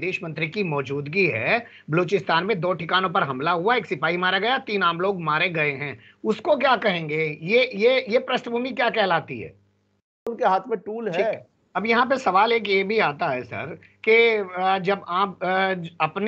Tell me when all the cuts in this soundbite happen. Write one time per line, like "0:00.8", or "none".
0:10.3